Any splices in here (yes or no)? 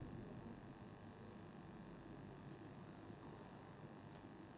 no